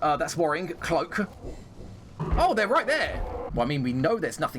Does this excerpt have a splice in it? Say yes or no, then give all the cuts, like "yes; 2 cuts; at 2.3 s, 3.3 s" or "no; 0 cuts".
yes; 2 cuts; at 2.1 s, 3.4 s